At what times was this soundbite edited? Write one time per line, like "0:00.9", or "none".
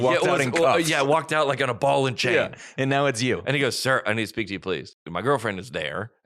0:05.0